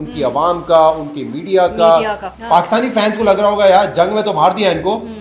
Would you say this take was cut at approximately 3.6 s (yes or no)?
no